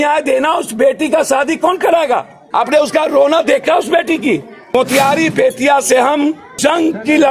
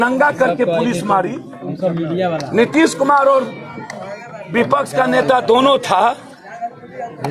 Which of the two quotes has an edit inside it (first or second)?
first